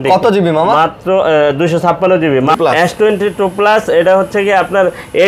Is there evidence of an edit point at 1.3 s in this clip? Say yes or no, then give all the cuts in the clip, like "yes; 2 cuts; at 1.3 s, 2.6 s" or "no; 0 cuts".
no; 1 cut; at 2.6 s